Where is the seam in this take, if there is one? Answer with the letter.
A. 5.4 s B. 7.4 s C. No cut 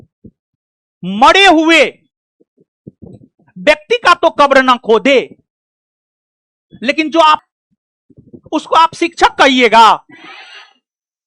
B